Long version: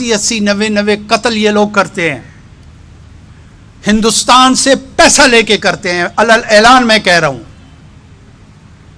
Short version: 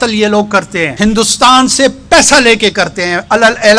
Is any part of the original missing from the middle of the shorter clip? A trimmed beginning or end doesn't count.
yes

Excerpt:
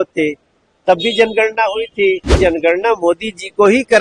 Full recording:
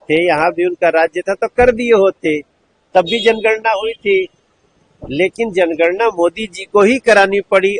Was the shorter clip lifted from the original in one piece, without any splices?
no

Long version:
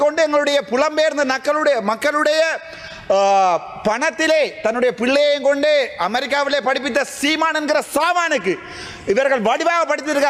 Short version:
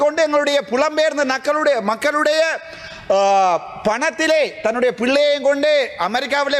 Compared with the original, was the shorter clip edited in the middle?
no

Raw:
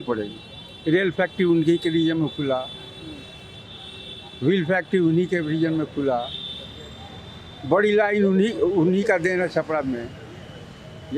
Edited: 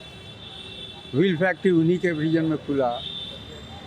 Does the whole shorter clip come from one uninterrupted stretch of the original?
yes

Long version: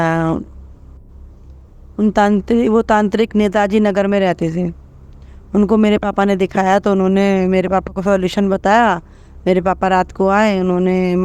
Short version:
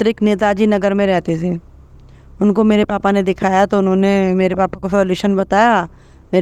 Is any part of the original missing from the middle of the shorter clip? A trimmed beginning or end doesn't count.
no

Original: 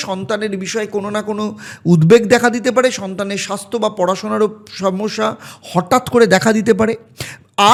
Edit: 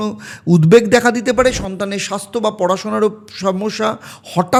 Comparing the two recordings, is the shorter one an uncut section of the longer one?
yes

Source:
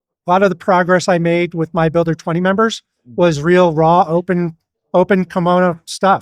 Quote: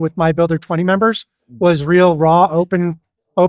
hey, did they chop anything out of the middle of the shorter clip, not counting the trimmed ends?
no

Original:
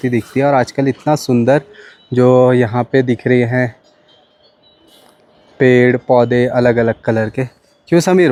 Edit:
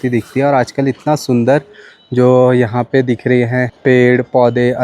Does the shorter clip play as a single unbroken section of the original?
no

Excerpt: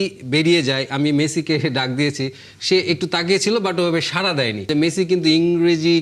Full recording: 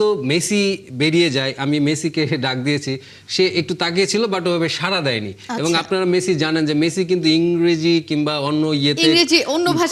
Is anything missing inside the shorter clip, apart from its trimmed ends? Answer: yes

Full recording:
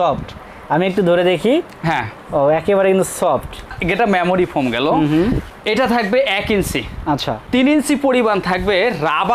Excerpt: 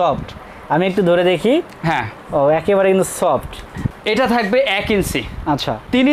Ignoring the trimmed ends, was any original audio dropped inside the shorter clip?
yes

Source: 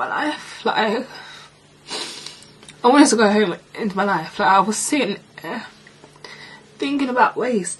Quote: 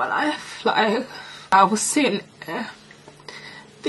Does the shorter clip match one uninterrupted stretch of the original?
no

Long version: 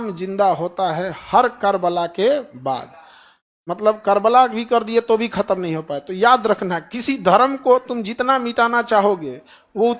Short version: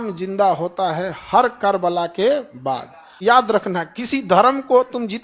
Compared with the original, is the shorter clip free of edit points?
no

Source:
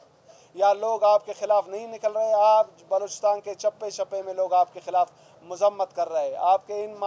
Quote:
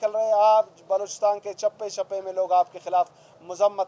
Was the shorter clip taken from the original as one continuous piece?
yes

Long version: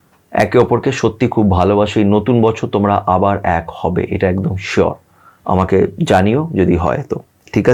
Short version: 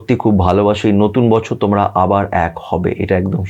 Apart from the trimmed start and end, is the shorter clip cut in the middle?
no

